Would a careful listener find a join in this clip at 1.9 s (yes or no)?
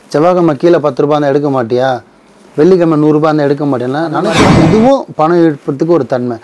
no